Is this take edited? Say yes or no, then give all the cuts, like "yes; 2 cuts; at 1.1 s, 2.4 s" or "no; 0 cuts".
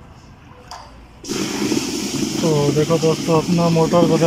no; 0 cuts